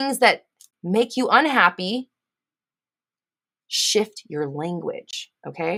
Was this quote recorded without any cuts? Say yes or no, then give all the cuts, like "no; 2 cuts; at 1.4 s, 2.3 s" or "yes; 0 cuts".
yes; 0 cuts